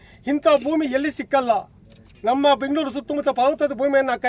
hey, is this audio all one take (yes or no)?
yes